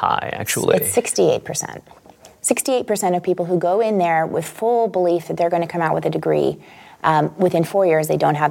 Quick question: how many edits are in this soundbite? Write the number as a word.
zero